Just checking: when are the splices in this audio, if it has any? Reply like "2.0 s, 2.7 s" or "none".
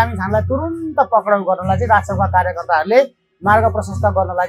none